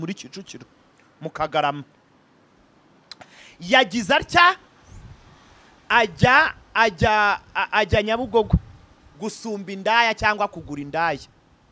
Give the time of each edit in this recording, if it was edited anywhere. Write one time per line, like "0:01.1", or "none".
none